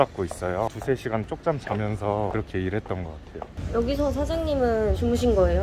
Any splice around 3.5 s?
yes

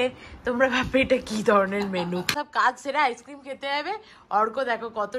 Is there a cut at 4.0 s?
no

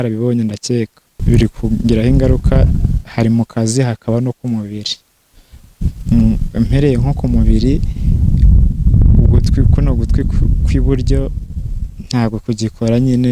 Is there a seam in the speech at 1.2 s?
yes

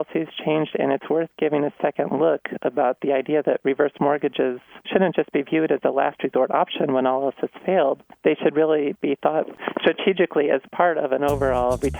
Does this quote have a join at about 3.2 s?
no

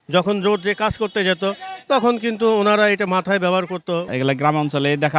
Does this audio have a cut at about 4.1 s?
yes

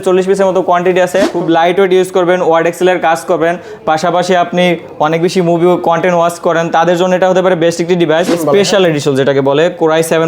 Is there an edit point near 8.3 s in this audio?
yes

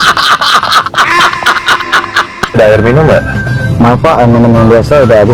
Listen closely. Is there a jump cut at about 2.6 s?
yes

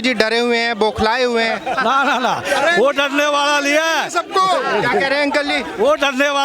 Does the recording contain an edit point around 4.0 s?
no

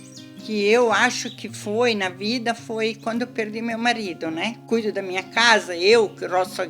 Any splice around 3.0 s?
no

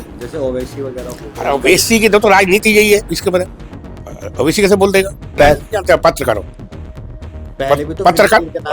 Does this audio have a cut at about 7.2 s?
no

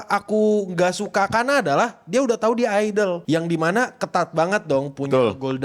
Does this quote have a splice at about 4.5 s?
no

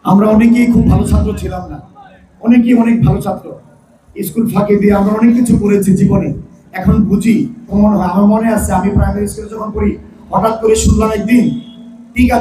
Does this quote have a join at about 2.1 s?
no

